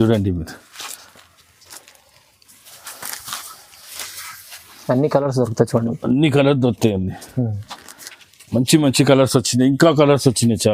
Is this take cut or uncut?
uncut